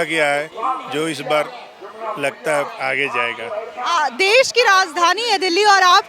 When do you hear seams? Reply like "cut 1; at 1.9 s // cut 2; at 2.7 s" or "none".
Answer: none